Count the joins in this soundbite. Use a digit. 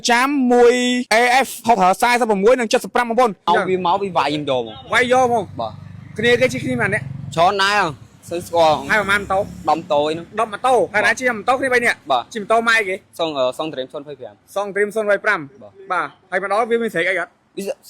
1